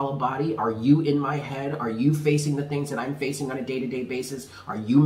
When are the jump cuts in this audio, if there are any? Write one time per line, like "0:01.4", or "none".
none

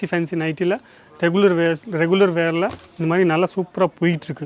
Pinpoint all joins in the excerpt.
none

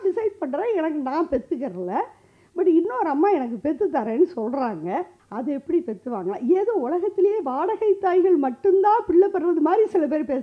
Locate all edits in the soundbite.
0:05.2

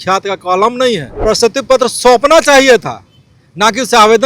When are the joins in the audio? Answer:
0:01.1

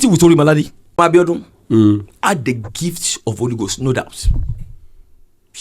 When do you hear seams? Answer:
0:01.0

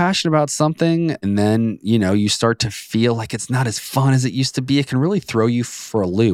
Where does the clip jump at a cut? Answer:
0:01.2

